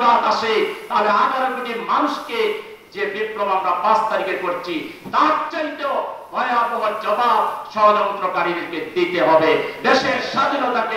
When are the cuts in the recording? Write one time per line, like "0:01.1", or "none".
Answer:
none